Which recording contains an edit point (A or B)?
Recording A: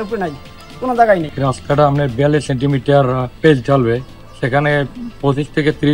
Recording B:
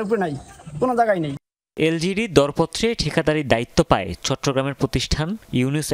A